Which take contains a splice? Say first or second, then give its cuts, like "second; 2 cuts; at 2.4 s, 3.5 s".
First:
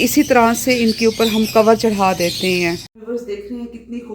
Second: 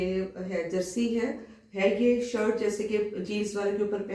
first; 1 cut; at 2.9 s